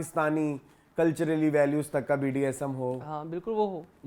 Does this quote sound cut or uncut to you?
uncut